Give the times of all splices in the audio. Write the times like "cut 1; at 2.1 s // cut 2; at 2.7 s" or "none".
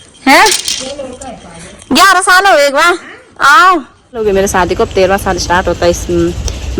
cut 1; at 4.2 s